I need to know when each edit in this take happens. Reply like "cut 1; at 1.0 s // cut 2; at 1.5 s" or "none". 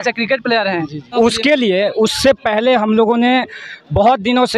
cut 1; at 1.1 s